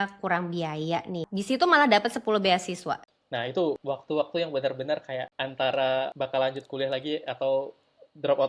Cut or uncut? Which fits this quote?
cut